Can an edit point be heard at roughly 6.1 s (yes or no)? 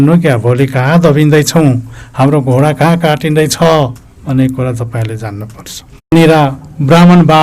yes